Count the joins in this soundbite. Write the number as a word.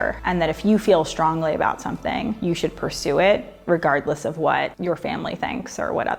zero